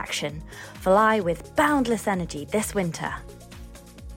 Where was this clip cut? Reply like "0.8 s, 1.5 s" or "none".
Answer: 3.2 s